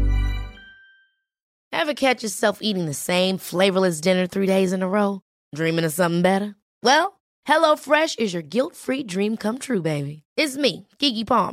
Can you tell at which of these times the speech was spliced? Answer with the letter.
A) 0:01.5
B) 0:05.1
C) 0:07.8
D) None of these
A